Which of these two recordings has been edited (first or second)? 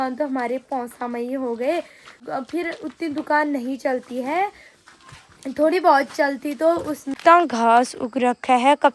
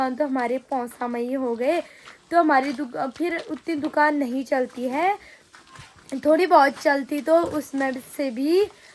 first